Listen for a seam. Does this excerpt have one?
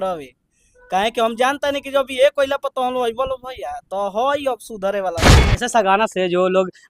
yes; 1 cut; at 5.4 s

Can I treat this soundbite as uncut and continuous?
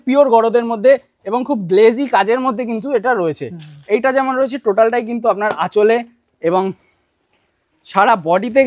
yes; 0 cuts

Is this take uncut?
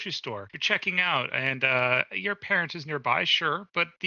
yes; 0 cuts

